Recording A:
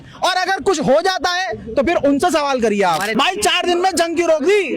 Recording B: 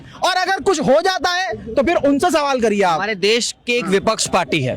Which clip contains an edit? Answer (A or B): A